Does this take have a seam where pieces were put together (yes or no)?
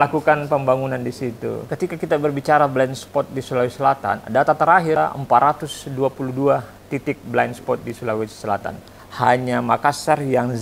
yes